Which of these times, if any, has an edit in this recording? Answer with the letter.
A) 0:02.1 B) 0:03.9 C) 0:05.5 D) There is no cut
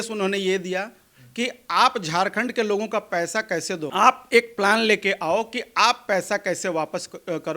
B